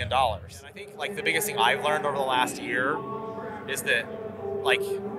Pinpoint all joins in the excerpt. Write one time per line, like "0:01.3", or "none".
0:00.9